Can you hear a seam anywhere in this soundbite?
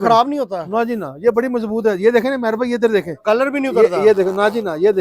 no; 0 cuts

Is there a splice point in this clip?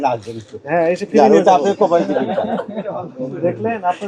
no; 0 cuts

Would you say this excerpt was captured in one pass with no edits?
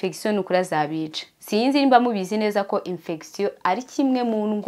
yes; 0 cuts

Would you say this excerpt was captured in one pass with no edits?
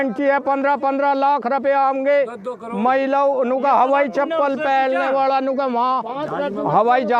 yes; 0 cuts

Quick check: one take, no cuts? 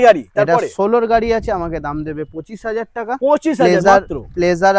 yes; 0 cuts

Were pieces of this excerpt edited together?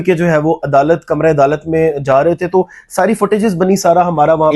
no; 0 cuts

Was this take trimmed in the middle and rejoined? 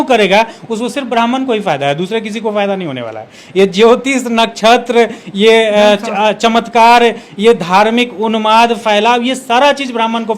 no; 0 cuts

